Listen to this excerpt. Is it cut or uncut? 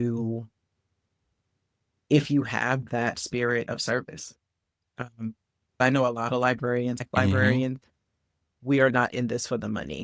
uncut